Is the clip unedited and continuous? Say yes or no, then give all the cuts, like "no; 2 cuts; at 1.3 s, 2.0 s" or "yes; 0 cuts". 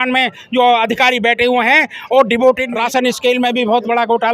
no; 1 cut; at 2.7 s